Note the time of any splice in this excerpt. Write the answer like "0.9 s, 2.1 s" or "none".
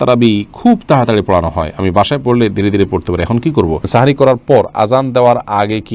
3.9 s